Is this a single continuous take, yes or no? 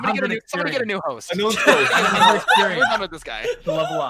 yes